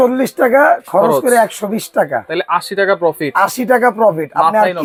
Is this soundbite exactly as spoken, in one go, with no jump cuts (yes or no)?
yes